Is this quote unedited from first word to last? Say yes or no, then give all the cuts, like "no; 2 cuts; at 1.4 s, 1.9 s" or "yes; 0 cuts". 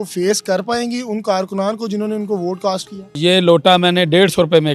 no; 1 cut; at 3.1 s